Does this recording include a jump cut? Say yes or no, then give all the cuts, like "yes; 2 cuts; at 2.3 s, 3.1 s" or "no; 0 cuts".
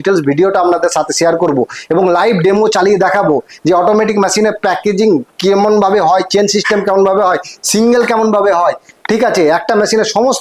no; 0 cuts